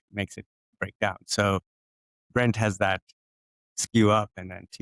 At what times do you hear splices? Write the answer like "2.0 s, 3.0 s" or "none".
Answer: none